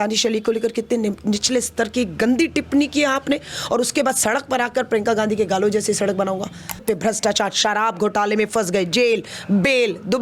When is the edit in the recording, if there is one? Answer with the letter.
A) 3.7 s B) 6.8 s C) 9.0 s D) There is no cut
B